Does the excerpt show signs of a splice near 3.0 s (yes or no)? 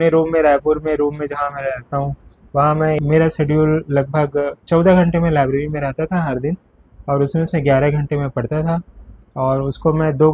yes